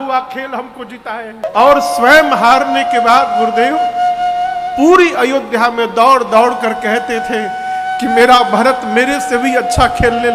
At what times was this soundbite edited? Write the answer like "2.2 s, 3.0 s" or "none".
1.4 s